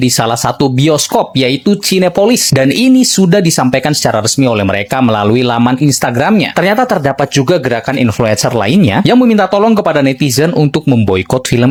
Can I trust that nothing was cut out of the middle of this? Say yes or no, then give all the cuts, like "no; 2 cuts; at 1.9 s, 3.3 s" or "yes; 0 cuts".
yes; 0 cuts